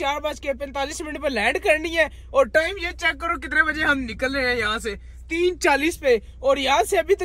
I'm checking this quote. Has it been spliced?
no; 0 cuts

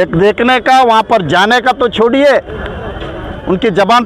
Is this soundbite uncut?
yes; 0 cuts

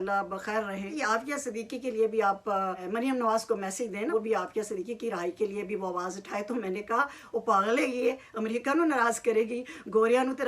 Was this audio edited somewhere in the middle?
yes; 3 cuts; at 0.9 s, 2.8 s, 4.1 s

